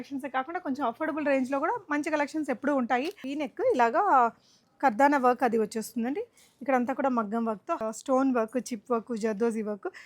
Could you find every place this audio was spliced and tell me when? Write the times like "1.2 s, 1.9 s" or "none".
3.3 s, 7.8 s